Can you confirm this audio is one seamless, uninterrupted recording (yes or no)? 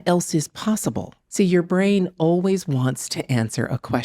no